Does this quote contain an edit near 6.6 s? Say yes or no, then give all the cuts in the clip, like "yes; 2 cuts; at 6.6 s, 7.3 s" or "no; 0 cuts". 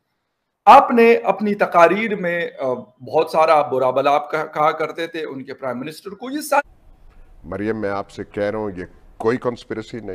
yes; 1 cut; at 6.6 s